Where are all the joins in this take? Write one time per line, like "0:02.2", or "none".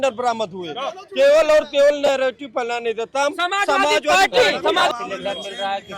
0:04.9